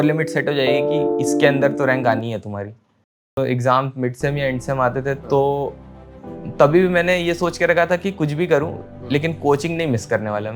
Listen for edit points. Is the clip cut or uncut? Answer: cut